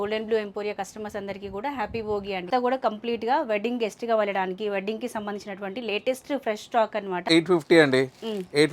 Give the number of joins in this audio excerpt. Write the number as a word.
two